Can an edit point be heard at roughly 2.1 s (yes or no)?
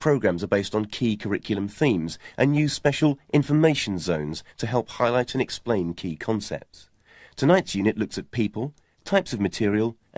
no